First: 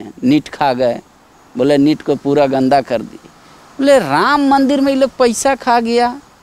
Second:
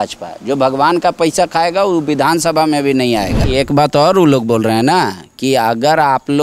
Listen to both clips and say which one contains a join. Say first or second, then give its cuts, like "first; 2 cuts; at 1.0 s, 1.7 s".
second; 1 cut; at 3.4 s